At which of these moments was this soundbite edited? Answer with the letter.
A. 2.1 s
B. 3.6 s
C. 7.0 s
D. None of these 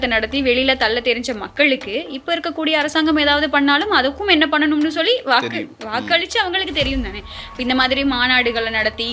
D